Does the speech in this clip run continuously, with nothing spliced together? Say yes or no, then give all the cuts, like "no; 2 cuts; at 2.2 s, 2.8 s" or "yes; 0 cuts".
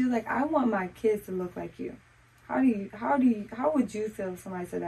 yes; 0 cuts